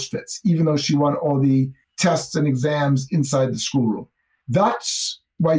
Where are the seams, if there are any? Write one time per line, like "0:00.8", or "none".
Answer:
0:01.8